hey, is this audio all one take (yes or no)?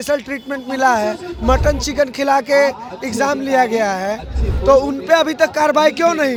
yes